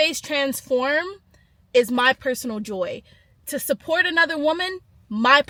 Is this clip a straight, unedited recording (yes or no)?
yes